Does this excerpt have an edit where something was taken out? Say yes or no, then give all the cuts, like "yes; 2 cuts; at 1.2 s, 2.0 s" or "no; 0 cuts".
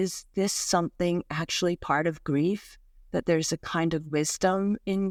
no; 0 cuts